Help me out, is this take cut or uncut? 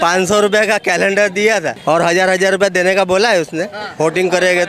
cut